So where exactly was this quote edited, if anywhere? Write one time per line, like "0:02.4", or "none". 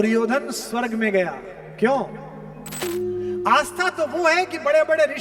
0:02.8